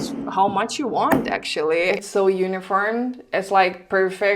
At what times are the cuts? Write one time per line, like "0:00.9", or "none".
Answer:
0:02.0